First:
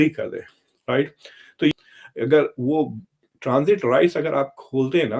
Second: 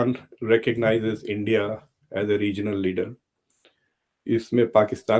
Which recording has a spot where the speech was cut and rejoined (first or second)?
first